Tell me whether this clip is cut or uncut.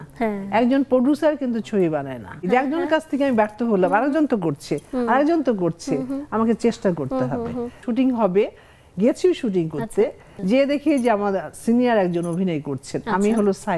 cut